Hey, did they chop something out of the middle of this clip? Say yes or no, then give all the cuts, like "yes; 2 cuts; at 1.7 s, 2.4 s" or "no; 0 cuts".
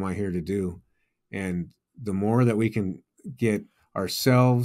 no; 0 cuts